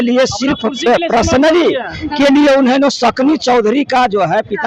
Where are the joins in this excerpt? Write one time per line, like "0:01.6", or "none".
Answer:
none

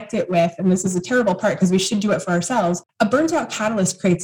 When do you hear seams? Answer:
0:02.9

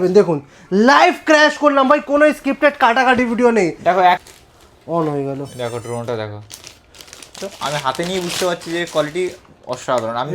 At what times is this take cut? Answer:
0:04.2
0:07.3

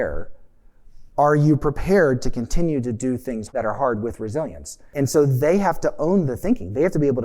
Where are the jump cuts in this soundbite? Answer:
0:03.5
0:04.9

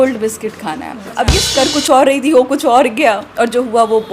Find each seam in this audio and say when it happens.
0:01.4

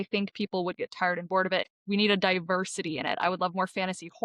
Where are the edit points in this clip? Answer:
0:01.7

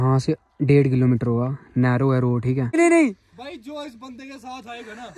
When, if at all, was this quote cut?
0:02.7

